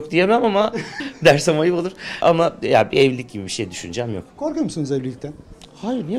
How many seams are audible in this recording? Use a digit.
2